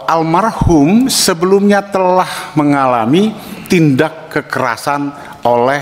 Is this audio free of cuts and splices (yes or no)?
yes